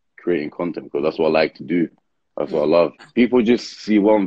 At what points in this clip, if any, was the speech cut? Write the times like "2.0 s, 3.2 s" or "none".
3.1 s